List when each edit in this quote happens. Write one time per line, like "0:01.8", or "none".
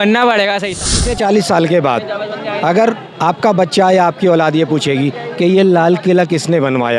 0:01.0